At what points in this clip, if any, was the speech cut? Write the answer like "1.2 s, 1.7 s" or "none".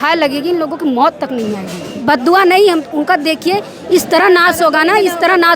1.9 s